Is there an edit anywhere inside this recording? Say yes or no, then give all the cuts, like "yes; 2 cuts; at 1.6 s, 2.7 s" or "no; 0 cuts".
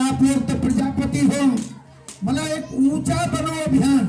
no; 0 cuts